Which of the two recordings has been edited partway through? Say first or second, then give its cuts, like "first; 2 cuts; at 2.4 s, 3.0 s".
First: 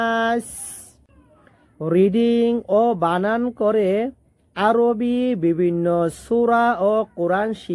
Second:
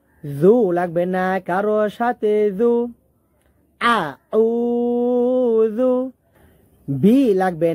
first; 1 cut; at 1.0 s